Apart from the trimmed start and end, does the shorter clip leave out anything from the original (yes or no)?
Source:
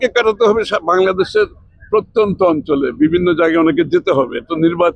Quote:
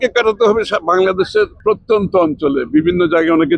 yes